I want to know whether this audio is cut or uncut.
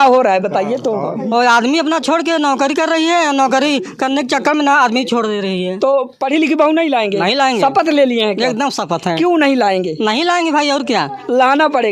uncut